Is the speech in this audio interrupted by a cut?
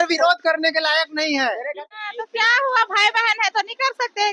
yes; 1 cut; at 1.7 s

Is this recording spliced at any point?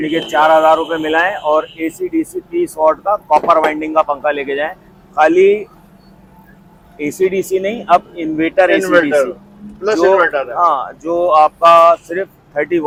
no; 0 cuts

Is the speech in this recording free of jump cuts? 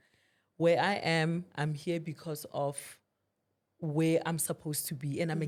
yes; 0 cuts

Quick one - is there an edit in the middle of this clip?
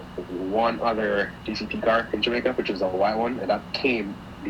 no; 0 cuts

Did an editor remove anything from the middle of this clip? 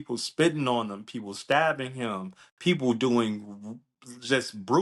no; 0 cuts

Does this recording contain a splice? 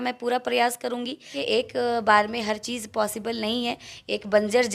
yes; 1 cut; at 1.4 s

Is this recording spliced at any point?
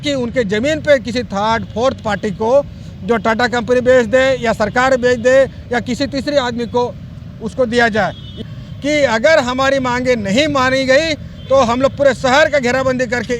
yes; 1 cut; at 8.5 s

